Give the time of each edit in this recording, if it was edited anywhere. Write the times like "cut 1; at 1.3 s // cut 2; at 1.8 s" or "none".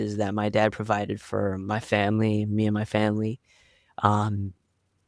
none